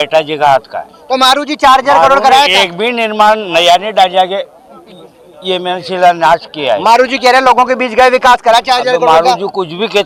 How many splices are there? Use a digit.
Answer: 0